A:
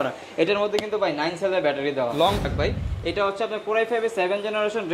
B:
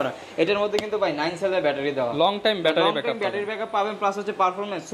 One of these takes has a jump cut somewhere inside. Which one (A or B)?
A